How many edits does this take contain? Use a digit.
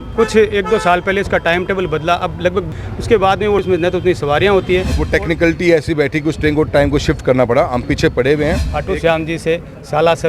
4